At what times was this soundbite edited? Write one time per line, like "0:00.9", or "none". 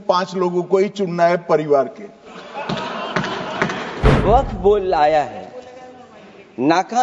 0:04.0

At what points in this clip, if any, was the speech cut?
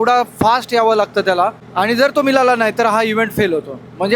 0:01.6

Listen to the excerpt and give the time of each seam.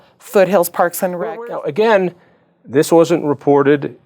0:01.2

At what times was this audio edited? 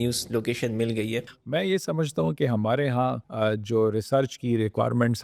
0:01.3
0:03.2

